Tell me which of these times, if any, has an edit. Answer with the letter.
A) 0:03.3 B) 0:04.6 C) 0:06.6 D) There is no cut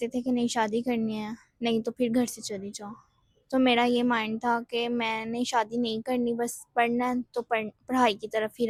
D